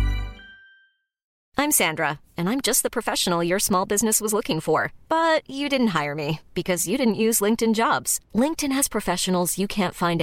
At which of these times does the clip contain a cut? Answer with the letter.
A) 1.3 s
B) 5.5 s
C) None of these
A